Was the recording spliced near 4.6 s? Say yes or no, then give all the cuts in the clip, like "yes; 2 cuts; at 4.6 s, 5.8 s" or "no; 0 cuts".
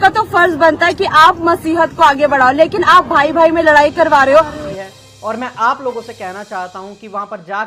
yes; 1 cut; at 4.6 s